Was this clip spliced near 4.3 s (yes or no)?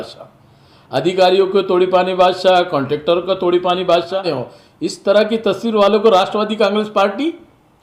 yes